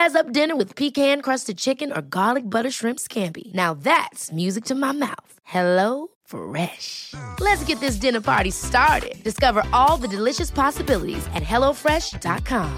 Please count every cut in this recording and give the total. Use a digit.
0